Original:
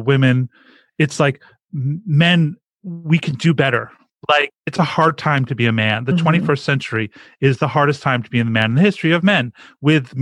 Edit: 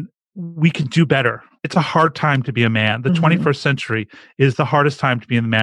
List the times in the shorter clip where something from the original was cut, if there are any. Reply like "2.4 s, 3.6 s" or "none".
1.6 s